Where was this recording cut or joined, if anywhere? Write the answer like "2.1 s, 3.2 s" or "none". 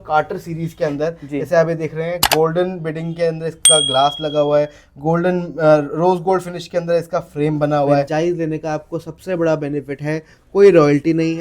8.1 s